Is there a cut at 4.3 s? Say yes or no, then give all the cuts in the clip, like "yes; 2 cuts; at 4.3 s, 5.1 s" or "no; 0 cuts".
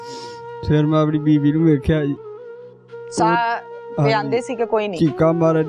no; 0 cuts